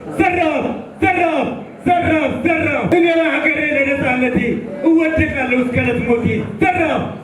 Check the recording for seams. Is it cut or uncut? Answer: cut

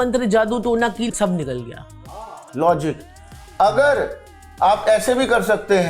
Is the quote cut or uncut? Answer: cut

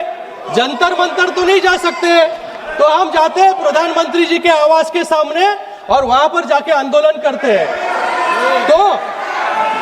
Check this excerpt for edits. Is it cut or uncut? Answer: uncut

